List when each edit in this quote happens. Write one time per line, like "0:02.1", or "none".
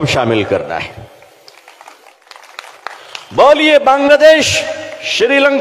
0:02.2